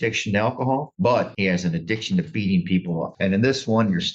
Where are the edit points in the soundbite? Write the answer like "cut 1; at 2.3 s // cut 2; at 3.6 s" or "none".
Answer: cut 1; at 3.1 s